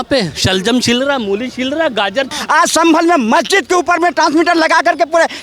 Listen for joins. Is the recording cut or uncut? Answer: cut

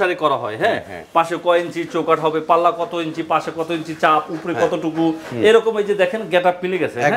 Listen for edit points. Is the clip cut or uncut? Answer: uncut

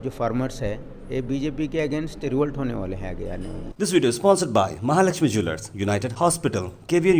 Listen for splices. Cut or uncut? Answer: cut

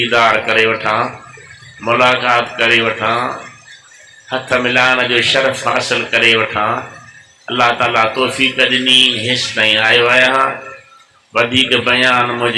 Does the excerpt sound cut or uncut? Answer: uncut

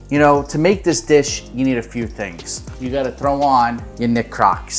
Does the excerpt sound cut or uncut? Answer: cut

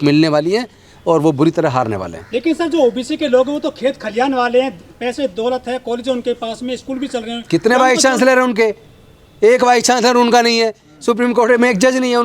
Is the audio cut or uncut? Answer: uncut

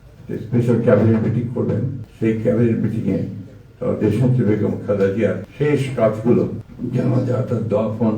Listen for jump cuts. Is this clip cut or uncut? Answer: cut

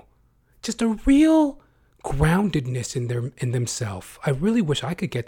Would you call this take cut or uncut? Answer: uncut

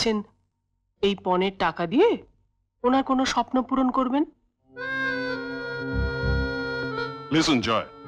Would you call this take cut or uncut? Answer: uncut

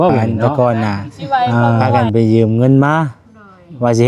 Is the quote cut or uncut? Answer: cut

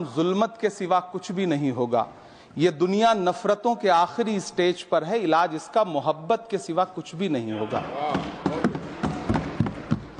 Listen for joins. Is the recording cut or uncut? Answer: uncut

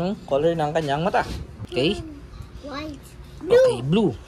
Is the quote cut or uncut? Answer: cut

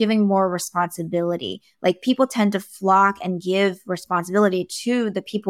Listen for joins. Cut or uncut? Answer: uncut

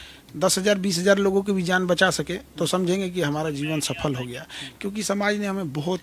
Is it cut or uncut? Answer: uncut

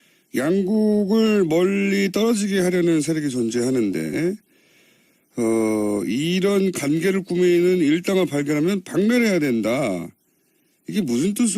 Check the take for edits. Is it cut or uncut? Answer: cut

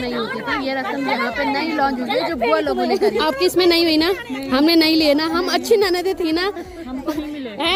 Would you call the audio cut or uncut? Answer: uncut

